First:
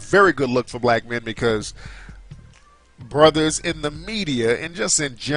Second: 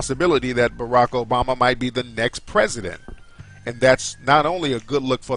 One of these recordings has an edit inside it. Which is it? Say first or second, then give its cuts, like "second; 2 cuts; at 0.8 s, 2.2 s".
second; 1 cut; at 2.1 s